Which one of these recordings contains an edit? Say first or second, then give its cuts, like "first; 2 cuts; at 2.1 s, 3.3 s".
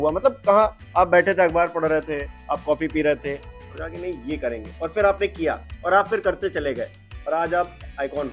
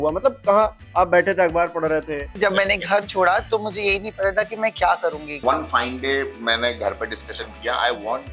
second; 2 cuts; at 2.3 s, 5.4 s